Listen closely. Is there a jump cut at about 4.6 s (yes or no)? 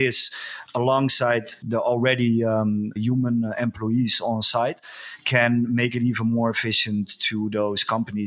no